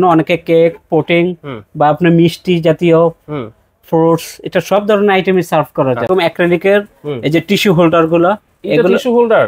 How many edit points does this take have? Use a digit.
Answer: 1